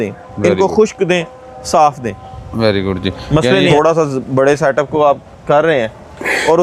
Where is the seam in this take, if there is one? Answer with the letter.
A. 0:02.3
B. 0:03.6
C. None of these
B